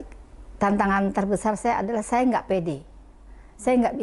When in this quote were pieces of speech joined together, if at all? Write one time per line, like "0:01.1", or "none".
none